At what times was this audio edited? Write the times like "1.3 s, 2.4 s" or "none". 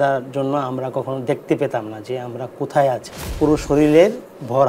3.2 s